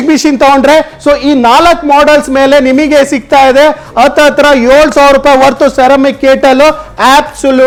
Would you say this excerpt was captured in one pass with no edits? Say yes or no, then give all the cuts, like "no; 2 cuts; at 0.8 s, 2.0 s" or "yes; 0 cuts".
yes; 0 cuts